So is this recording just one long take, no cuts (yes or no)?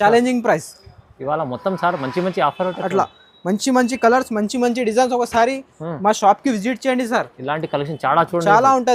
yes